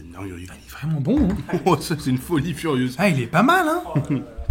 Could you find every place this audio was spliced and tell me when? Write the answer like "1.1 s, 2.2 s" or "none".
none